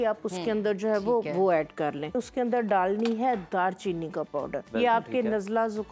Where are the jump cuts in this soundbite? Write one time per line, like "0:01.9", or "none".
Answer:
0:02.2
0:04.7